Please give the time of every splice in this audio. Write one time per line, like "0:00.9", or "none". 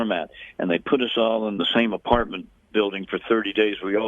0:01.6